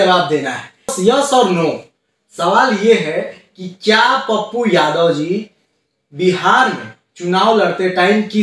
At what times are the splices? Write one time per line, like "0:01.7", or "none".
0:00.9